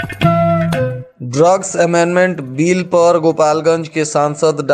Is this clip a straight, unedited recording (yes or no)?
no